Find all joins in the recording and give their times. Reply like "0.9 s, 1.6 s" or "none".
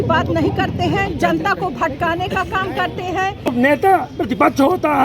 3.5 s